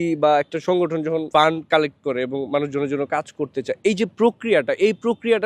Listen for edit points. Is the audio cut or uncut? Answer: uncut